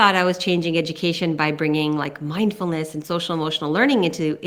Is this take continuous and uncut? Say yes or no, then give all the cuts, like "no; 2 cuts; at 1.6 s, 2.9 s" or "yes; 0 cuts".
yes; 0 cuts